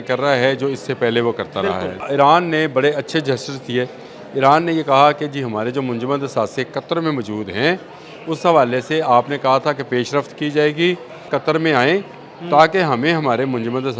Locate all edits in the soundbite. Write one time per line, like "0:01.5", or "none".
0:02.0
0:11.3